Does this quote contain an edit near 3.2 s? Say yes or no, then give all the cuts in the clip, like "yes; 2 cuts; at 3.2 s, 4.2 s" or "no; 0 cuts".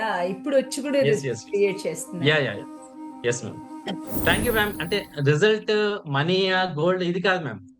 no; 1 cut; at 4.8 s